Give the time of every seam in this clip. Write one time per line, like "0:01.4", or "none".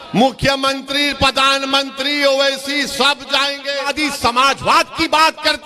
0:03.9